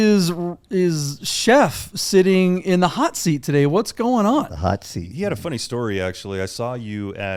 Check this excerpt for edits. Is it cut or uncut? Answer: uncut